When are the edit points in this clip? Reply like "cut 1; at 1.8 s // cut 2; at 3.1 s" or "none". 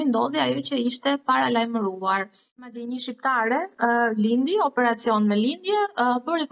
cut 1; at 2.8 s